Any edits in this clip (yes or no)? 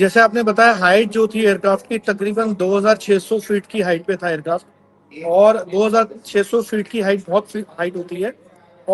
no